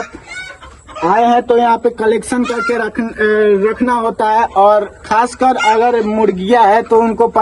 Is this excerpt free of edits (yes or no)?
yes